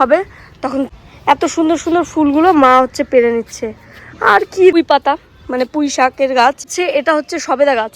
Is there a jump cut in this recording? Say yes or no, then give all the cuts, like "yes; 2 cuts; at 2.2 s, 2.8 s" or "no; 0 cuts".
yes; 3 cuts; at 0.9 s, 4.8 s, 6.7 s